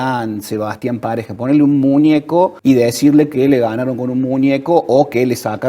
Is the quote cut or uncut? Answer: cut